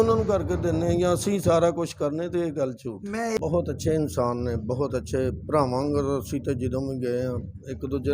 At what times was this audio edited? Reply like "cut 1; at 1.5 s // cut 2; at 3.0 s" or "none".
cut 1; at 3.3 s